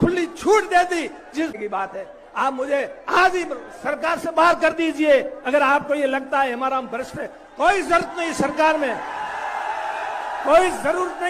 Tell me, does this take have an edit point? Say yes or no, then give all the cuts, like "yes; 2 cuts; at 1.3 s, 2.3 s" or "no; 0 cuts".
yes; 1 cut; at 1.6 s